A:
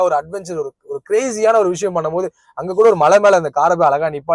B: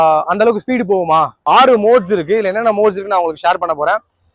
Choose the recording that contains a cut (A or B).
B